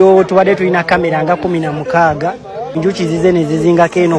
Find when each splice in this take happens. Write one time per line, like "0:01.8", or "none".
0:02.7